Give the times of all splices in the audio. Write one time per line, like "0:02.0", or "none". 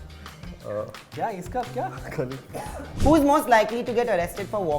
0:02.4

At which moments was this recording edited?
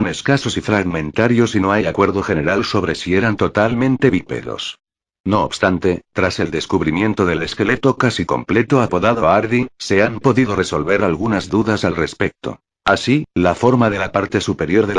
0:06.3

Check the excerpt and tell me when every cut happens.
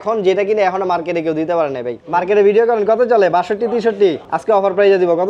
0:01.9
0:04.3

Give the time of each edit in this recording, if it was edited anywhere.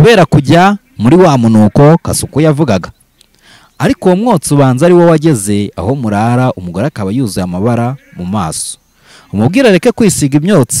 none

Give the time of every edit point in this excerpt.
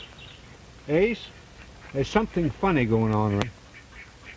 0:03.4

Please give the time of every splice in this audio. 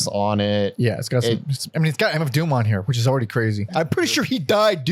0:03.6

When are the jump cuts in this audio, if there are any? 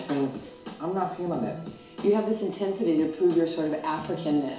none

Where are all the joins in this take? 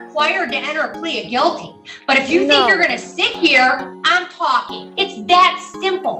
0:04.8

